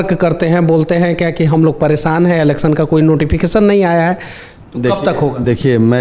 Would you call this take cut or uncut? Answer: uncut